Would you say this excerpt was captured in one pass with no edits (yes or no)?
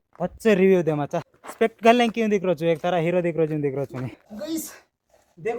no